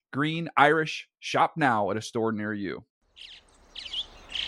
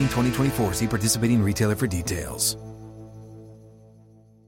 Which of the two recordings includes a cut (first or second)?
first